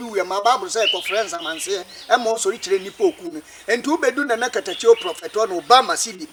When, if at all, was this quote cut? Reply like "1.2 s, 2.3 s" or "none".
none